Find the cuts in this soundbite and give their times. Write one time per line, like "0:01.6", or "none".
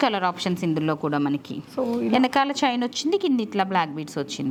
none